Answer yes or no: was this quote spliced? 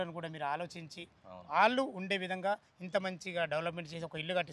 no